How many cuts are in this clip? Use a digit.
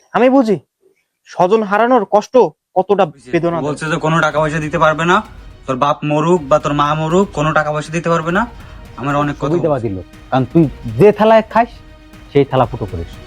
2